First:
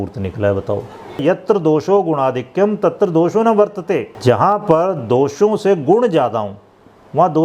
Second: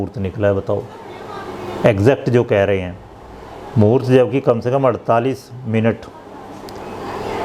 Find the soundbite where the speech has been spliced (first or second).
first